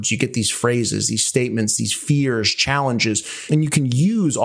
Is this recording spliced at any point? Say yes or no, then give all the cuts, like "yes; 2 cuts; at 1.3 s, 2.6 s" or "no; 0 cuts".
yes; 1 cut; at 3.4 s